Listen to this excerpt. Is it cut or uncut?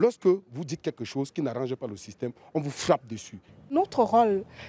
cut